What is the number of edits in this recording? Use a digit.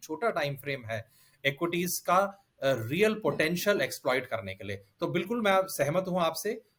0